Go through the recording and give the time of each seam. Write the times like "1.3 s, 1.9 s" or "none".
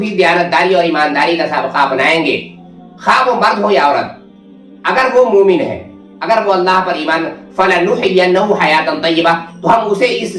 none